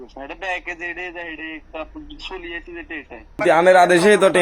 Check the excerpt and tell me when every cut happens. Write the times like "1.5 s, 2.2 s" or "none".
3.4 s